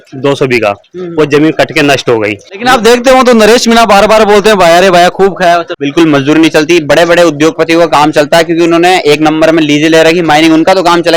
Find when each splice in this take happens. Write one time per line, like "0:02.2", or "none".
0:02.5
0:05.7